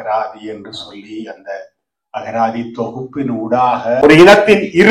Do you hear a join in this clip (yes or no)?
yes